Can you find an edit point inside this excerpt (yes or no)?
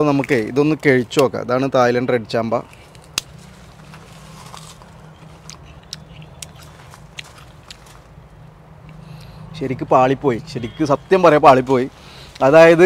no